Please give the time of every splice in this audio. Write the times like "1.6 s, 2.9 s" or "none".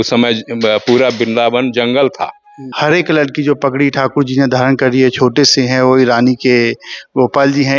2.6 s